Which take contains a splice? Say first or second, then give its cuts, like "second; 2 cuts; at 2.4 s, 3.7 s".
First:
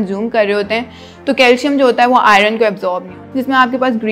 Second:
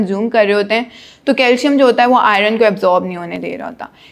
first; 1 cut; at 3.1 s